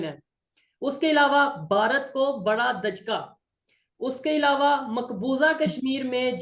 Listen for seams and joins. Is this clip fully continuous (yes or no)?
yes